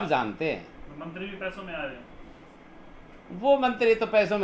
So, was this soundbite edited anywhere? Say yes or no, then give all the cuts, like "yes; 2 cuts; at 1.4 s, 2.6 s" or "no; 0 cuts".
no; 0 cuts